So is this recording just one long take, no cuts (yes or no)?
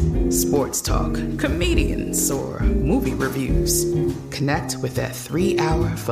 yes